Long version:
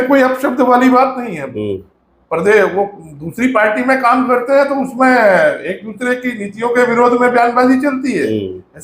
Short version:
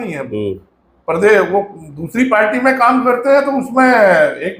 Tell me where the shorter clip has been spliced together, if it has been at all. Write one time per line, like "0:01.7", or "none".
none

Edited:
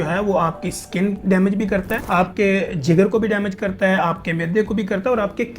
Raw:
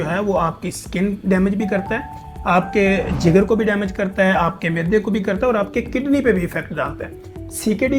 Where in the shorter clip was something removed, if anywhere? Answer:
0:02.0

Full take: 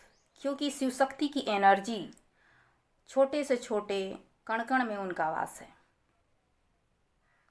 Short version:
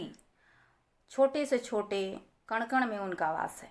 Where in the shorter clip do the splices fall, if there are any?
none

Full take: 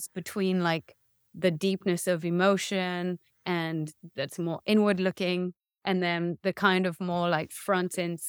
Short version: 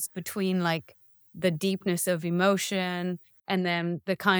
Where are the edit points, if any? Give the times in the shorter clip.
0:03.3

